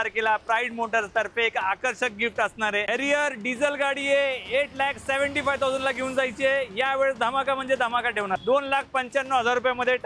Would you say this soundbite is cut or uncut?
cut